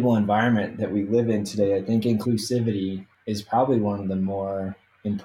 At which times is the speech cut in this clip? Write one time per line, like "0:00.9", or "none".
0:02.2
0:03.1